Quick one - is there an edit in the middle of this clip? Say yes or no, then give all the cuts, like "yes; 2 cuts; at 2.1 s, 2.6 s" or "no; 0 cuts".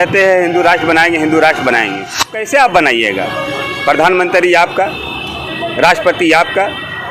yes; 1 cut; at 2.3 s